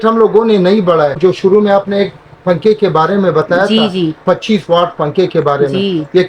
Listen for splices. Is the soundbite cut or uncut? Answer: cut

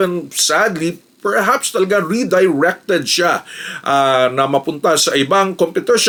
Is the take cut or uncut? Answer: uncut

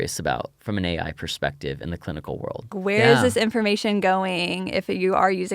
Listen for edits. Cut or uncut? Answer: cut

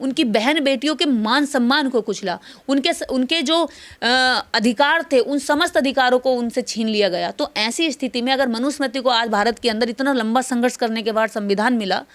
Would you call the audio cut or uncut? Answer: uncut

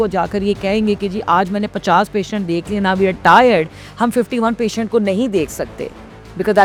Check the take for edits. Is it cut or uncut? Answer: uncut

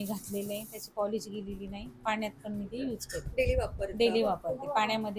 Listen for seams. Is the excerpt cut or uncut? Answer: uncut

